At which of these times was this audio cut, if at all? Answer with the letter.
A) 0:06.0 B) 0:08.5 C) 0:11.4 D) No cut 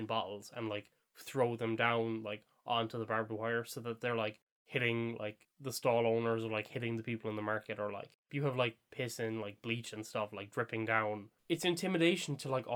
C